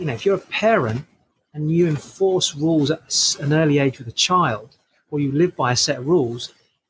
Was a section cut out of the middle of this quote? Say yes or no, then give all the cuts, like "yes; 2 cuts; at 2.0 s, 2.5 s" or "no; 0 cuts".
no; 0 cuts